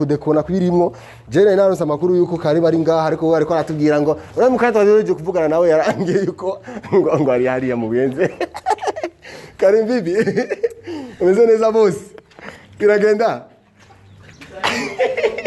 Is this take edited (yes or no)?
no